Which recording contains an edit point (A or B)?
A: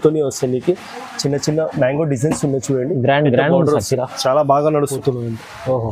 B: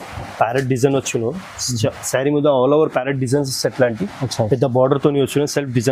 A